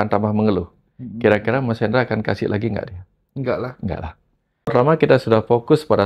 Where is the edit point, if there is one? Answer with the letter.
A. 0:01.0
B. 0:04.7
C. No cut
B